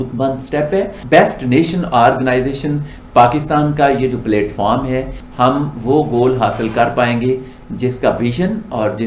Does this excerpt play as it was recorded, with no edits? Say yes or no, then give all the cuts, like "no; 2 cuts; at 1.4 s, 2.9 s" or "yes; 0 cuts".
no; 2 cuts; at 1.0 s, 5.2 s